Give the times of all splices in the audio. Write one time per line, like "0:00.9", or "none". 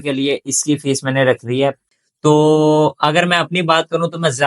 0:01.8